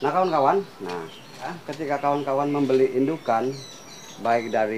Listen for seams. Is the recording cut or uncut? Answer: cut